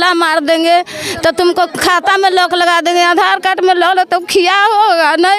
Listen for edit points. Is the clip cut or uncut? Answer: uncut